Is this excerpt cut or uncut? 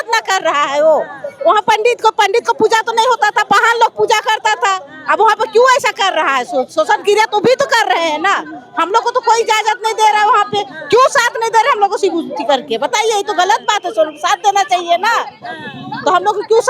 uncut